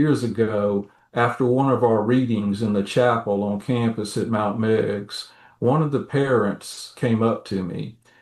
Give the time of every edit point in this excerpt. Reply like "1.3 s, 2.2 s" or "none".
none